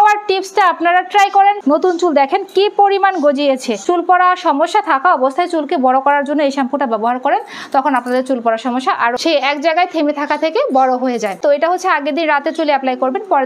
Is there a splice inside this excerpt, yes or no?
yes